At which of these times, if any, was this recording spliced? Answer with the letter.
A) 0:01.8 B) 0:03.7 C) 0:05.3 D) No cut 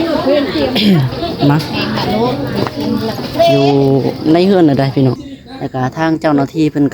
C